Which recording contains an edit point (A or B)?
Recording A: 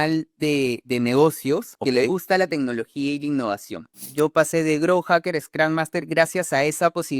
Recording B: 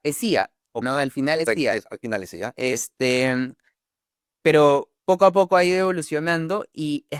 A